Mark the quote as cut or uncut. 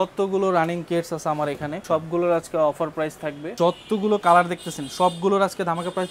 cut